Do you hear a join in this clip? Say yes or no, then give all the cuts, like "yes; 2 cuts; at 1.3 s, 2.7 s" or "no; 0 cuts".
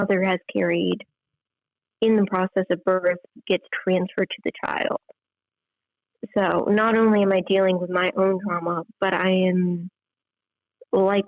no; 0 cuts